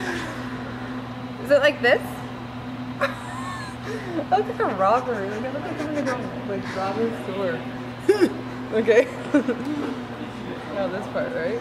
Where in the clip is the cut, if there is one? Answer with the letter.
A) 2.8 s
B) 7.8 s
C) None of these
B